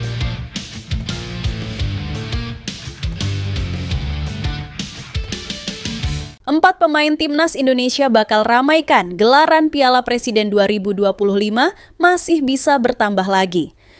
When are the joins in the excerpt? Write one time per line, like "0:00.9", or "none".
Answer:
none